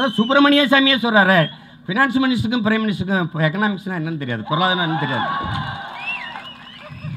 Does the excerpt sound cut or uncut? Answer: uncut